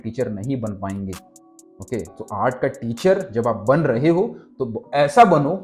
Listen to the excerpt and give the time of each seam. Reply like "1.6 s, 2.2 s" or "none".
none